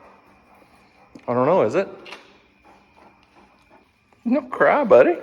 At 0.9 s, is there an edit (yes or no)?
no